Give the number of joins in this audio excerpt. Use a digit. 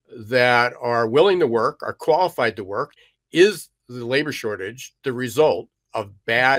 1